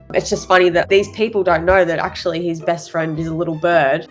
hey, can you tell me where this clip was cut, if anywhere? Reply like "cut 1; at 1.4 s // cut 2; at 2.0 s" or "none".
none

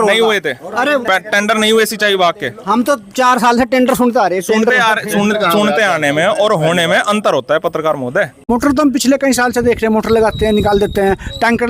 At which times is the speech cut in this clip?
cut 1; at 8.5 s

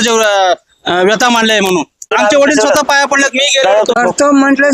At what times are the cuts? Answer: cut 1; at 2.1 s // cut 2; at 4.0 s

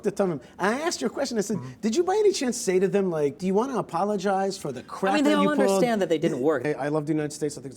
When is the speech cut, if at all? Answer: cut 1; at 3.4 s // cut 2; at 6.6 s

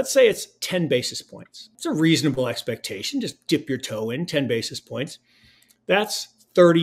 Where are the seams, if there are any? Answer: cut 1; at 1.7 s

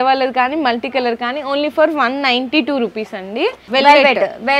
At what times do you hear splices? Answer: none

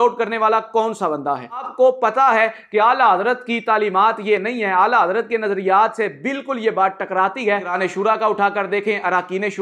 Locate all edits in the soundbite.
cut 1; at 1.7 s // cut 2; at 7.7 s

